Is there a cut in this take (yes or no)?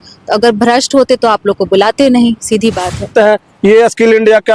yes